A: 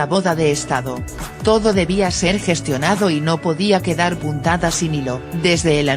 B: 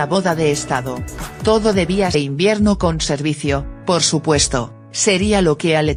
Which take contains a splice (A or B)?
A